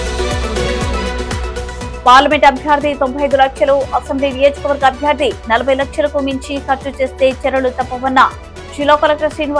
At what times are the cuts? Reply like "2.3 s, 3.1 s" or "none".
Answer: none